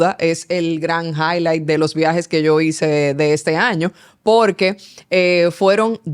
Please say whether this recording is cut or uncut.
uncut